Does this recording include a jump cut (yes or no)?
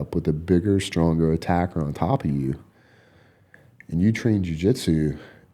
no